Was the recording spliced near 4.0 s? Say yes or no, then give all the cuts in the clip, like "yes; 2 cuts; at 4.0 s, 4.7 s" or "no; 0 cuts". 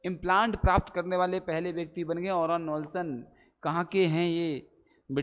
no; 0 cuts